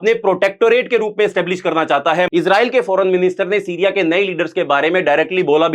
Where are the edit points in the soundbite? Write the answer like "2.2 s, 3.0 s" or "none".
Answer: 2.3 s

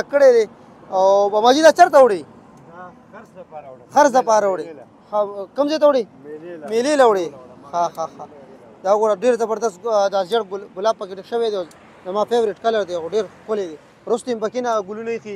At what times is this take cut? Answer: none

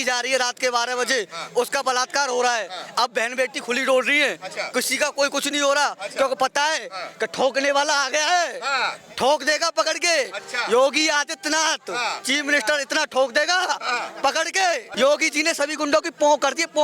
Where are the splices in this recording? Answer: 14.9 s

